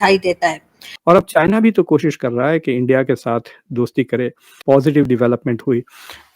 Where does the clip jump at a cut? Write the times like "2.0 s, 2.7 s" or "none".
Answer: 0.9 s